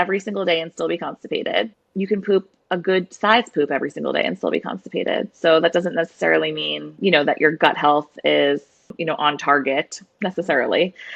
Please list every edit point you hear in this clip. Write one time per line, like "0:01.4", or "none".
0:01.8
0:10.0